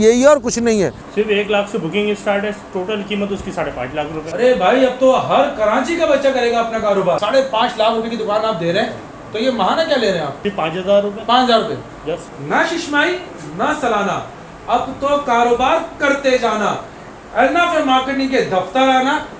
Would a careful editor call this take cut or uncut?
cut